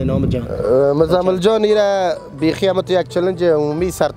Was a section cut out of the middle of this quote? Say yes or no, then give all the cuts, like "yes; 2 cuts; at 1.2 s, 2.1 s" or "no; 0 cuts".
no; 0 cuts